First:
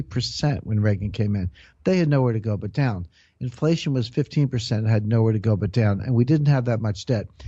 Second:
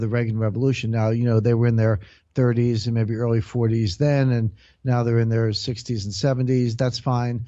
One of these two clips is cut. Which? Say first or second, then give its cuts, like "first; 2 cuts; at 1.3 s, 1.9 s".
second; 1 cut; at 1.7 s